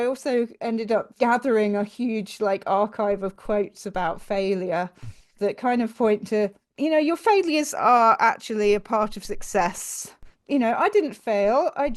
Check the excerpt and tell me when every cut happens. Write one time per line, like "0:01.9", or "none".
0:01.1